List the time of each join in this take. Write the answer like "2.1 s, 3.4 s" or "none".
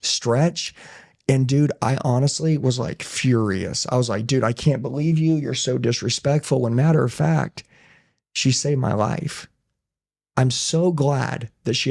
none